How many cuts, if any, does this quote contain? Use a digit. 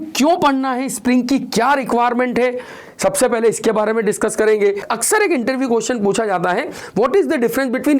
1